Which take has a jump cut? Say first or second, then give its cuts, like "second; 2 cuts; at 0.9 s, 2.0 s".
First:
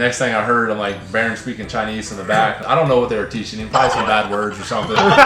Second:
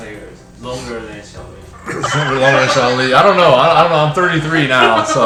first; 1 cut; at 2.6 s